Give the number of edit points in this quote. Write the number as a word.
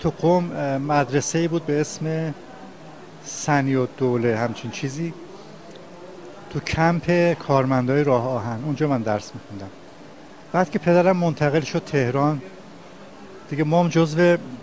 one